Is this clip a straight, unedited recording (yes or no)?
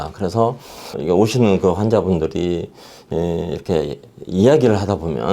no